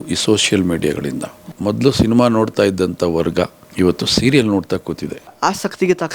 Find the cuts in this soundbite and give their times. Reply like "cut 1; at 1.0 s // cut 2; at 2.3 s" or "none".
cut 1; at 1.5 s // cut 2; at 3.6 s // cut 3; at 5.3 s